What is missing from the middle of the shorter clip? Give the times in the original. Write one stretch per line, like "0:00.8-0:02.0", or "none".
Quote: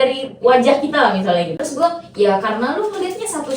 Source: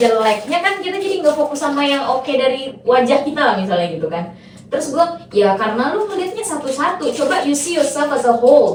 0:04.0-0:04.7